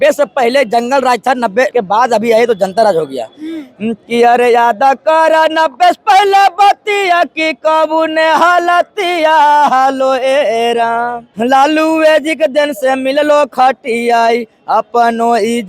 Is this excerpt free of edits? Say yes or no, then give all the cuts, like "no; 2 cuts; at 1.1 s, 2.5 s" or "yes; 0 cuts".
no; 2 cuts; at 1.7 s, 11.2 s